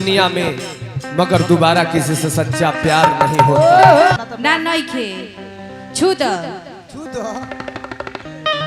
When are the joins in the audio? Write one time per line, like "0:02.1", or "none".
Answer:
0:04.2